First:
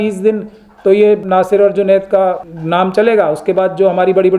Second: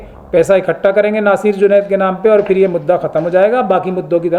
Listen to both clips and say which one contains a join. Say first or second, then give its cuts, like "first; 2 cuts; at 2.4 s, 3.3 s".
first; 2 cuts; at 1.2 s, 2.5 s